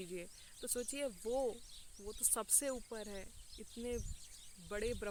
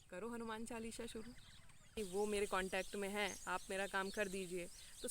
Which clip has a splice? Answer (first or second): second